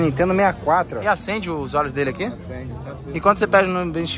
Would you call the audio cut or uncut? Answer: cut